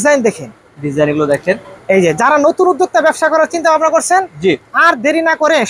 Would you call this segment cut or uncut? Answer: uncut